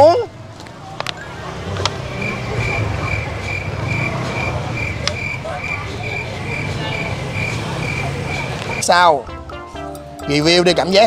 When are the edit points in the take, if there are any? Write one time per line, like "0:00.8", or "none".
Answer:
0:08.8